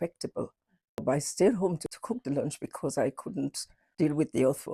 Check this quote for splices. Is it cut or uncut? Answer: cut